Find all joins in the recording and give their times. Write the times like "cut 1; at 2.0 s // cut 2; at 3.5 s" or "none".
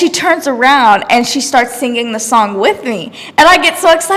none